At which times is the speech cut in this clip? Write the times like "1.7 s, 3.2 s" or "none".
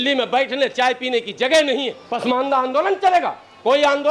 2.0 s